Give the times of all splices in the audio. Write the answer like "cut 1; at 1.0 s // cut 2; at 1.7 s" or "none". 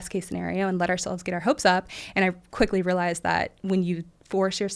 none